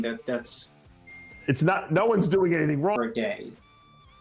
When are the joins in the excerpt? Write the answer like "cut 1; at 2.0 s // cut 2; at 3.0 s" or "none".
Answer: cut 1; at 3.0 s